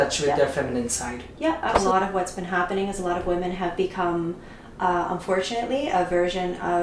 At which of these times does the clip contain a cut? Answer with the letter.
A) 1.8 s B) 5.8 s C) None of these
A